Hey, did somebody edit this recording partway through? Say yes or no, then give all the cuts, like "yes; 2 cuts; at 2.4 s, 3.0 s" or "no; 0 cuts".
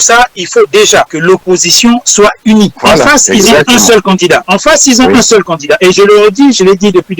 yes; 3 cuts; at 1.1 s, 2.8 s, 4.5 s